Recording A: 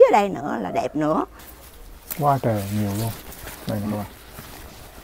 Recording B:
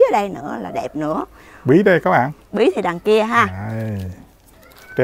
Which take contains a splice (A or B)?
A